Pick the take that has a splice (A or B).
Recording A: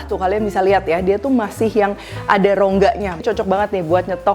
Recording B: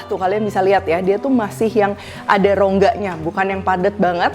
A